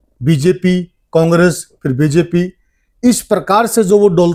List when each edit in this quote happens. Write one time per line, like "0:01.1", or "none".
none